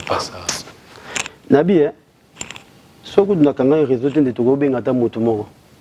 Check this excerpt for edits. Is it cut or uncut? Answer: uncut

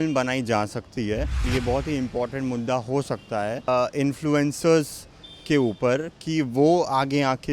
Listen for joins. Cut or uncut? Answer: cut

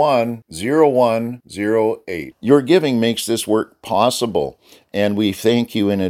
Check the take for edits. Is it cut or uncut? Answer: uncut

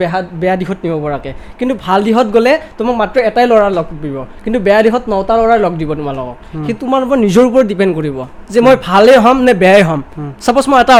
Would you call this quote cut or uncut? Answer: uncut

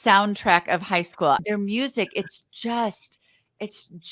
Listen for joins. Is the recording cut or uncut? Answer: cut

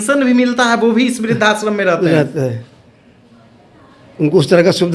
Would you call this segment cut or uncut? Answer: uncut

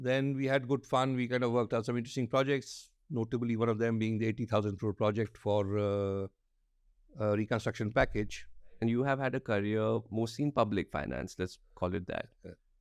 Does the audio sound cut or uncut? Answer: cut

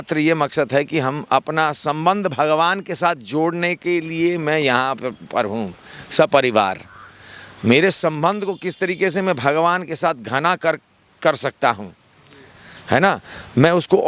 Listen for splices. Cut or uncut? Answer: uncut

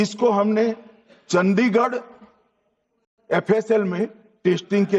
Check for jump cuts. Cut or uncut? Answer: uncut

